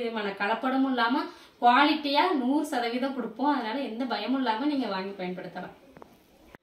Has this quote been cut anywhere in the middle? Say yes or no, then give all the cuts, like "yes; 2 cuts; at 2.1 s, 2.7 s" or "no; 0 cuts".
no; 0 cuts